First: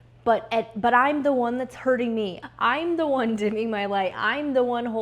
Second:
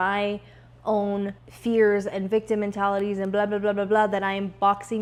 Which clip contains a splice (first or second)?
first